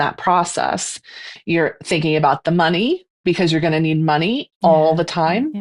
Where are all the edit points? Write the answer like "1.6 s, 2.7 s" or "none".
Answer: 1.3 s, 3.1 s